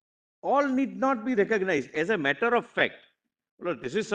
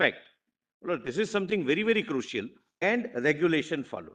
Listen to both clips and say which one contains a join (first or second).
second